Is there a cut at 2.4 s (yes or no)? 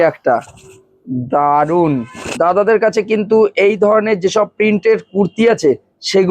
yes